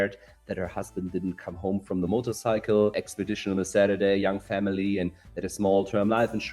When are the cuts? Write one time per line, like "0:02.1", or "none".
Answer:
0:03.1